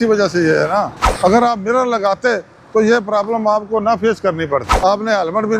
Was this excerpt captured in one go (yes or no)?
no